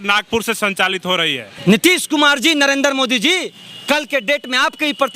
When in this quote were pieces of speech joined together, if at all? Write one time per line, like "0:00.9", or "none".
0:01.5

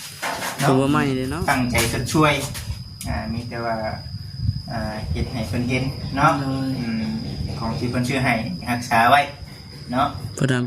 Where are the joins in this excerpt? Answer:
0:01.3

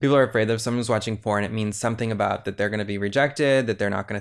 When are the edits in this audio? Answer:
none

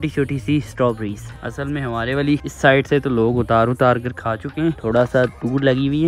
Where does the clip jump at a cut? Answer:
none

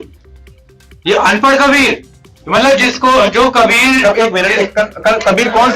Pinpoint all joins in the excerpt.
none

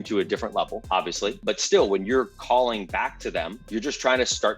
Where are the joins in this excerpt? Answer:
0:01.4
0:03.6

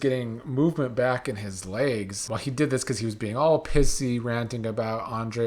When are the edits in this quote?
0:02.2

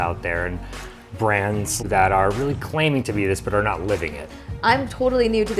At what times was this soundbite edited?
0:01.8
0:04.4

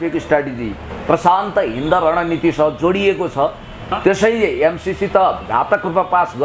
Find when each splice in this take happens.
0:03.8

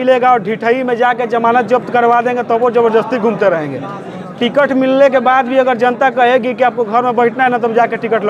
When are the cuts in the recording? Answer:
none

